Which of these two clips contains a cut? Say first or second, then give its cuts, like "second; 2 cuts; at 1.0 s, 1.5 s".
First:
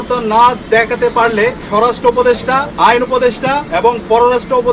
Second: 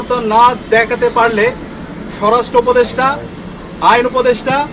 first; 3 cuts; at 1.6 s, 2.7 s, 3.7 s